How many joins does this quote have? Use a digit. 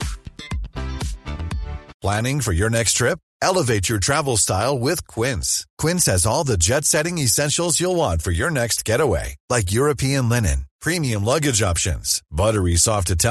1